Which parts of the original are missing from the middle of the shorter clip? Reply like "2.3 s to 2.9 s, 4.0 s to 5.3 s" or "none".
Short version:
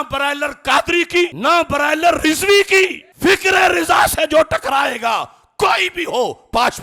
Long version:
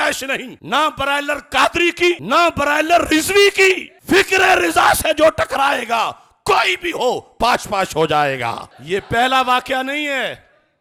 none